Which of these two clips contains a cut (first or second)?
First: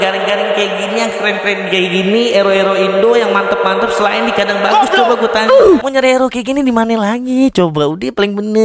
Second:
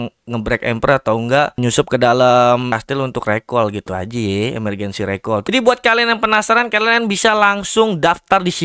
second